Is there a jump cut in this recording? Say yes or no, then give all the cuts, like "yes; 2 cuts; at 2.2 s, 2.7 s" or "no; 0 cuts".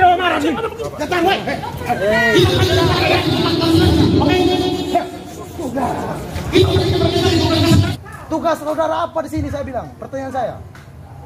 yes; 1 cut; at 7.9 s